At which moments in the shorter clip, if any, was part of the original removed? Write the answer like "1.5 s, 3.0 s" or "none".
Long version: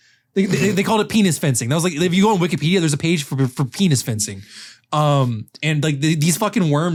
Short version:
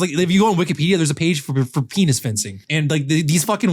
2.6 s